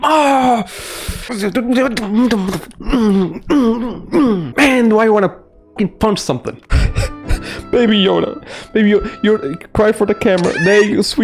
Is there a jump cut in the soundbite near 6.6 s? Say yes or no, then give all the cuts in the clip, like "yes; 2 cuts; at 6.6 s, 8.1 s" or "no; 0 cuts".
yes; 1 cut; at 6.6 s